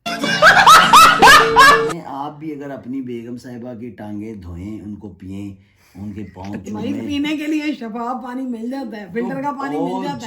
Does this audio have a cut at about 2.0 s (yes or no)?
yes